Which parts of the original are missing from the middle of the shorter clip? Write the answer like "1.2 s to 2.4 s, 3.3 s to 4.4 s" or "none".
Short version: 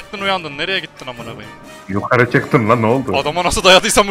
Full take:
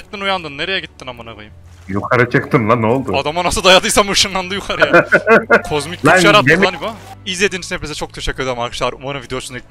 none